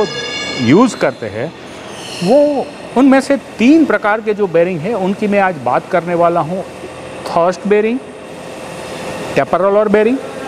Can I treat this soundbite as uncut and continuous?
yes; 0 cuts

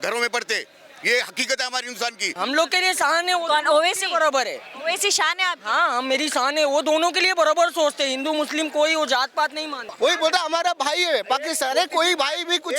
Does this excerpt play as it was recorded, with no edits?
no; 2 cuts; at 2.3 s, 9.9 s

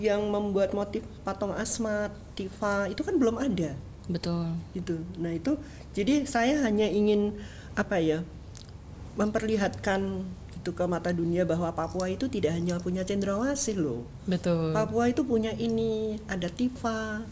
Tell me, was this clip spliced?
no; 0 cuts

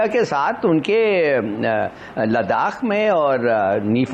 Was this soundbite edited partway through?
no; 0 cuts

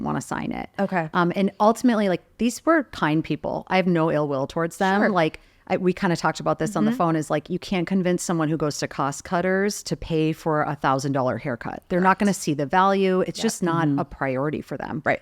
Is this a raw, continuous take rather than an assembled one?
yes; 0 cuts

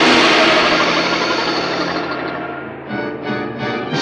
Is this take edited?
no; 0 cuts

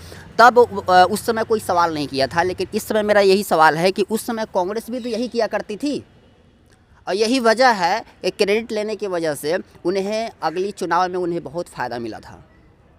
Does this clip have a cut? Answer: no; 0 cuts

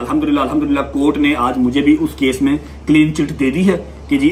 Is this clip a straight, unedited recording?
yes; 0 cuts

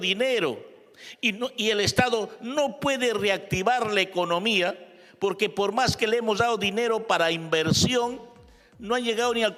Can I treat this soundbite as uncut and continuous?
yes; 0 cuts

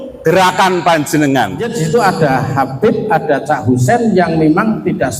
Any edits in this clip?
yes; 1 cut; at 1.8 s

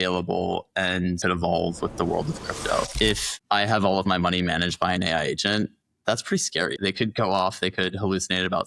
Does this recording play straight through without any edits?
no; 3 cuts; at 1.2 s, 2.9 s, 6.8 s

